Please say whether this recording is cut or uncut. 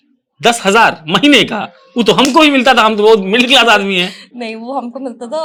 uncut